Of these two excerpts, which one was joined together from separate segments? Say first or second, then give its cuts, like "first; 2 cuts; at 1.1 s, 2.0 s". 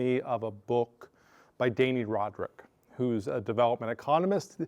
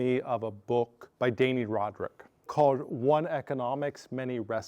second; 2 cuts; at 1.0 s, 2.5 s